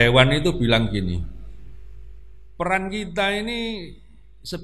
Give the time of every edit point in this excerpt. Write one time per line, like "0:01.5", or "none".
none